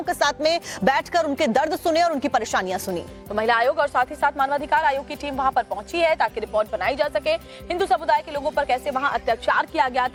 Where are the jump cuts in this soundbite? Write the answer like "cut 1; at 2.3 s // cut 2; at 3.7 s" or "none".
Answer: none